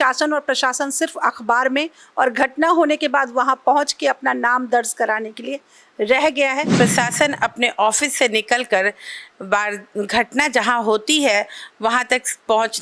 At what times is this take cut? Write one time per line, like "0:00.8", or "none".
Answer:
0:06.7